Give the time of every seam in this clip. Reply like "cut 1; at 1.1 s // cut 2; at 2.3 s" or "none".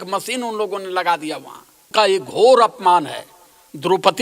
cut 1; at 1.8 s